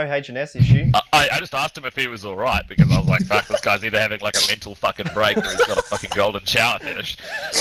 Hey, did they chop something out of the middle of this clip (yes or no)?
no